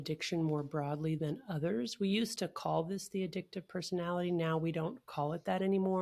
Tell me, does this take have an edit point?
no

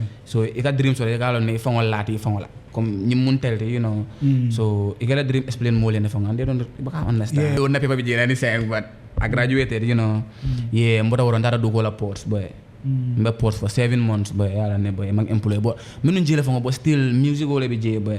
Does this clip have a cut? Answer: yes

